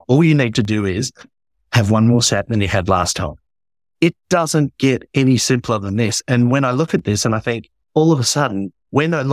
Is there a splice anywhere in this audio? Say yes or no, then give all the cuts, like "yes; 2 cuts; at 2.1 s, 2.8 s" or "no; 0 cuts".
yes; 1 cut; at 7.7 s